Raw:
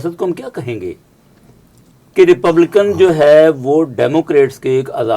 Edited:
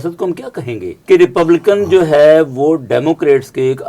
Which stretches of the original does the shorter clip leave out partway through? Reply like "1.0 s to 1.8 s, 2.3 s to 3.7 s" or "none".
0.9 s to 2.0 s